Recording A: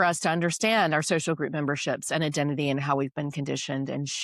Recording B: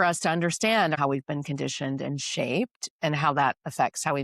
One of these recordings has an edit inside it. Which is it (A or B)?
B